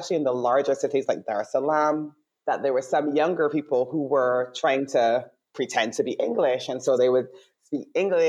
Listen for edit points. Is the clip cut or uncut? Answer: uncut